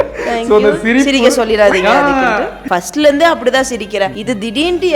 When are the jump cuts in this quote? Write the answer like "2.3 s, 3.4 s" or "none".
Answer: 2.6 s, 4.2 s